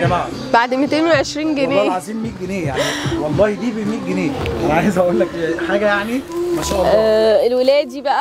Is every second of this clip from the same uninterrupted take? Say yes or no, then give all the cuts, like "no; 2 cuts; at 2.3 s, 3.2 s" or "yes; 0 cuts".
yes; 0 cuts